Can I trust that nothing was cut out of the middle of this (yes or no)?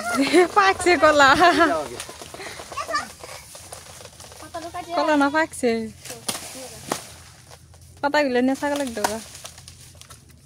yes